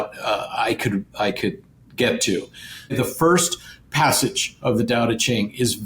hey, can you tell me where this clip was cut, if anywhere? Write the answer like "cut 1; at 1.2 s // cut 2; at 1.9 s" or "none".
cut 1; at 3.0 s